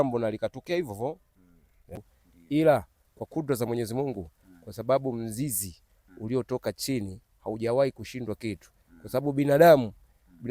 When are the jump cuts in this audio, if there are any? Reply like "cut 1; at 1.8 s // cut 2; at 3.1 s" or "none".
cut 1; at 2.0 s